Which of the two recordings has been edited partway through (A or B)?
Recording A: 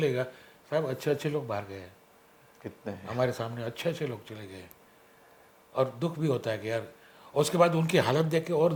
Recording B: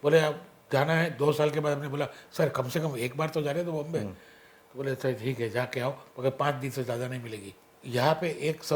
B